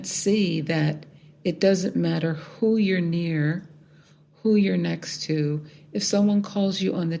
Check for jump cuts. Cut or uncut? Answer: uncut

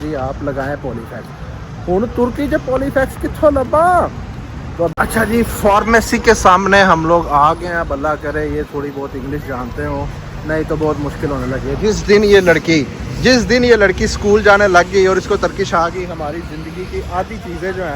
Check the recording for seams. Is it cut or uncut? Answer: cut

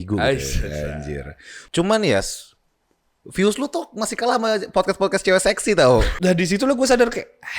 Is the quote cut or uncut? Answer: cut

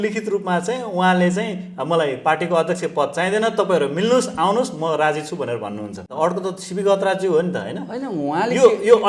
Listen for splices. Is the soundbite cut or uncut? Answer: cut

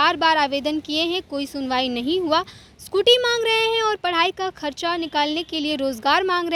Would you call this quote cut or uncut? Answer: uncut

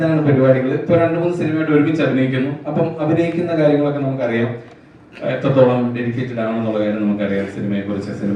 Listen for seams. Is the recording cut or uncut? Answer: uncut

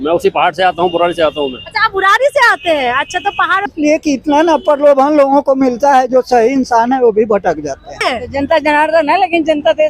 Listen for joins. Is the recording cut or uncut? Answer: cut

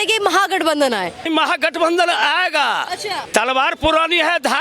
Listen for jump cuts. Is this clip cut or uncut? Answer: cut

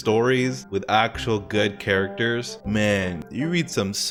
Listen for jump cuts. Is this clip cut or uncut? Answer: uncut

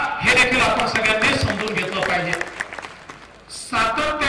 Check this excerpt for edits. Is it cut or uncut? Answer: uncut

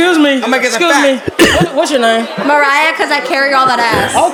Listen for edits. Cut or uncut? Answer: uncut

